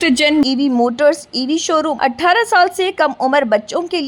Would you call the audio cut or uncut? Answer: cut